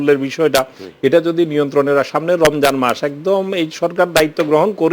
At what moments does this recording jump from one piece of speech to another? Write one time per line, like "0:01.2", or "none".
none